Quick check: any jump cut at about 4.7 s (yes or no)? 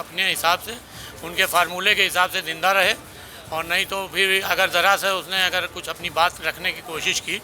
no